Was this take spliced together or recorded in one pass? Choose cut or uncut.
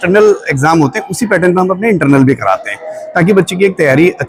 uncut